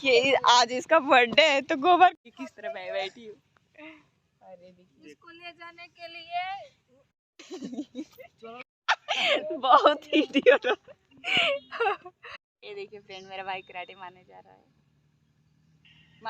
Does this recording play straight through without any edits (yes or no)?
no